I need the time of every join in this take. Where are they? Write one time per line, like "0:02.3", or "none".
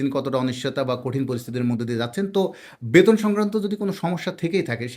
none